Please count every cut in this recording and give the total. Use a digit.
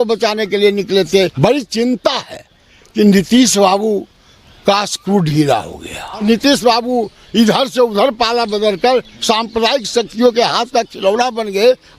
2